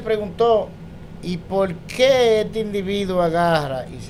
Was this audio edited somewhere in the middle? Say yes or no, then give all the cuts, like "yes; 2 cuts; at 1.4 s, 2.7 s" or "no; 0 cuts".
no; 0 cuts